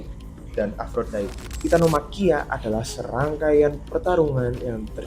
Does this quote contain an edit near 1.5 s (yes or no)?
yes